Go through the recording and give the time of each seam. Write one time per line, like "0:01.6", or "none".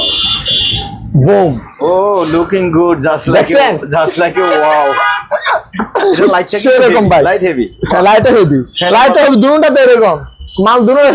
none